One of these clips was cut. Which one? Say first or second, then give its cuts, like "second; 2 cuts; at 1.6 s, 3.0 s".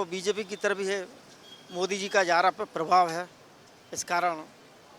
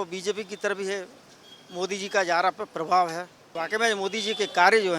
second; 1 cut; at 3.5 s